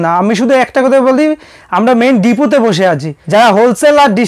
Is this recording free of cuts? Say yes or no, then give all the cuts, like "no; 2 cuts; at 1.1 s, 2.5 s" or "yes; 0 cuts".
no; 1 cut; at 3.1 s